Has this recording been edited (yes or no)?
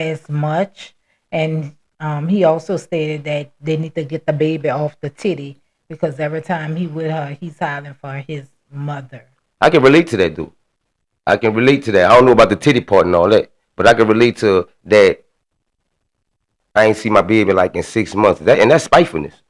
no